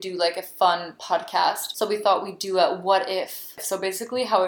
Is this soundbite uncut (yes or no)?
no